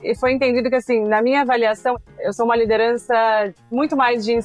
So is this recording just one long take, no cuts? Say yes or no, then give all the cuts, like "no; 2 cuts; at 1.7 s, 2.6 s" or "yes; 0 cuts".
no; 2 cuts; at 2.0 s, 3.6 s